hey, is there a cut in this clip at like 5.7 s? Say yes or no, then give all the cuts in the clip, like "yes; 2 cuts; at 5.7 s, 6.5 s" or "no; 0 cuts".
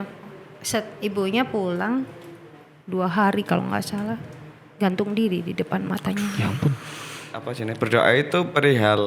no; 1 cut; at 7.6 s